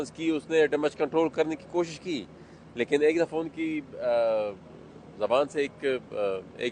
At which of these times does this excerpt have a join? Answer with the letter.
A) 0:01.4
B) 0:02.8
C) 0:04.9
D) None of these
D